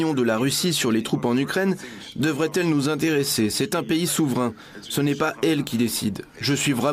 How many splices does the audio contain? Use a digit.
0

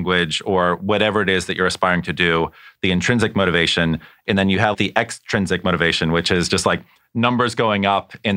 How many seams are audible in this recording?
1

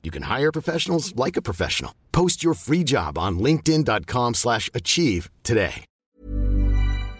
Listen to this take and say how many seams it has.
1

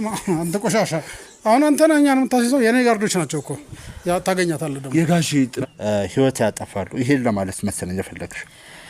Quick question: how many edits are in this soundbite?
1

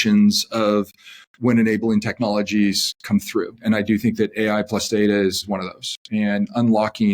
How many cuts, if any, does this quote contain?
2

